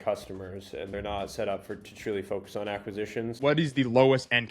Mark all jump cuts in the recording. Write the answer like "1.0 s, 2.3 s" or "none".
0.9 s, 3.3 s